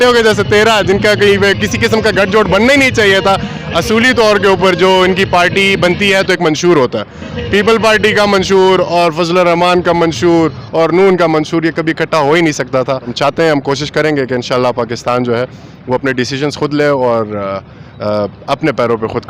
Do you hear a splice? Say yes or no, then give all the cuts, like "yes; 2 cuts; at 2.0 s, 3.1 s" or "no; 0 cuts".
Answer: yes; 1 cut; at 13.1 s